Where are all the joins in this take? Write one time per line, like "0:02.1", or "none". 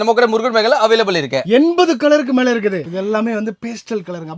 0:02.8